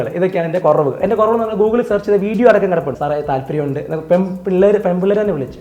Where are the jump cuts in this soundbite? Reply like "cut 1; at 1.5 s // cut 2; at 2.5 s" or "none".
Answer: cut 1; at 3.0 s